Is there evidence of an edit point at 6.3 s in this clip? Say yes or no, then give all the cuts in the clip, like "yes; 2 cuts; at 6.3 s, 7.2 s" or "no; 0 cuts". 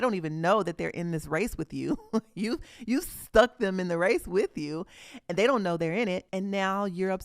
yes; 1 cut; at 6.3 s